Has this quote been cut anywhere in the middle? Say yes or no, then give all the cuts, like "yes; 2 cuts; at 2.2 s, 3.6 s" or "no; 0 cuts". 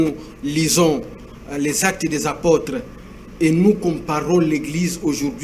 no; 0 cuts